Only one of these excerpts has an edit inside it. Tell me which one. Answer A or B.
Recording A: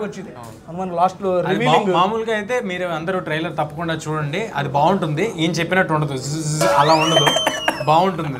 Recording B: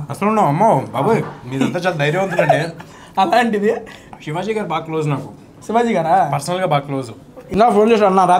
B